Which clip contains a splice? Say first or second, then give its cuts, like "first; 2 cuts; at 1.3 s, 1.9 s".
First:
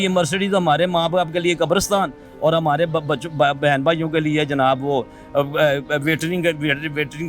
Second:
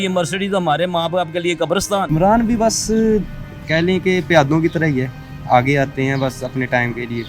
second; 1 cut; at 2.1 s